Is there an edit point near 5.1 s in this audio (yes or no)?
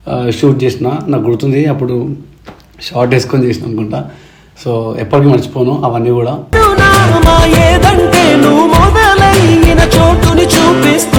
no